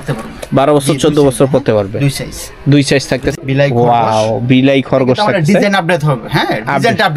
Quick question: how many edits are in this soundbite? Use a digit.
1